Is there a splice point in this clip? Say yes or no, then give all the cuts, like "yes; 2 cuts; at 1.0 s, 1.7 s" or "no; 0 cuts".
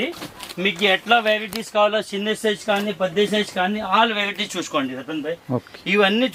no; 0 cuts